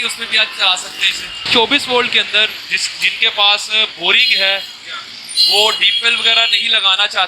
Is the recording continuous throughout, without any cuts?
no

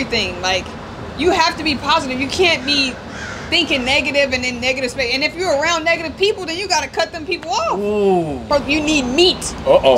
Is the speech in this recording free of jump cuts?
no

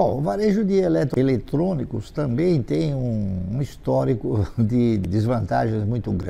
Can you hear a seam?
yes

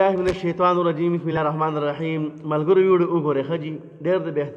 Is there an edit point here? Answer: yes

